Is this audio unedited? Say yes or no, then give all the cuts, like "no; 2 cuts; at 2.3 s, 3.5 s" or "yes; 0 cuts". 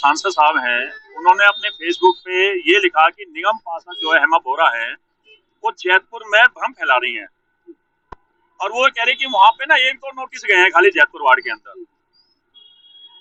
yes; 0 cuts